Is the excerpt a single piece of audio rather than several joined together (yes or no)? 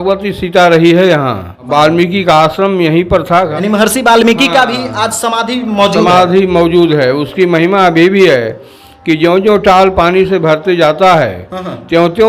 no